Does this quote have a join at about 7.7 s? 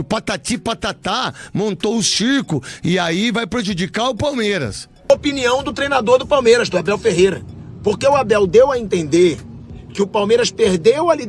no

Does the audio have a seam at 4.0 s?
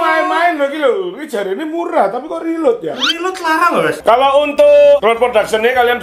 yes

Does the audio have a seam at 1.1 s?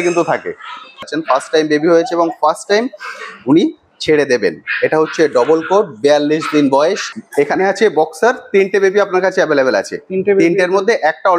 yes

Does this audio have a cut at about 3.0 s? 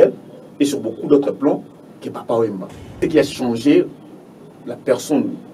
yes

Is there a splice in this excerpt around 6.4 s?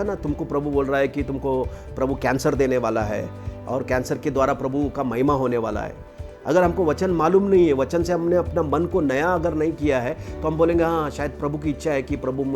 no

